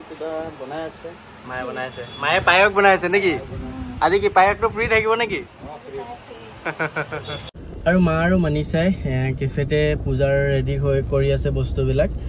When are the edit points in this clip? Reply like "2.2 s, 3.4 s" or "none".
none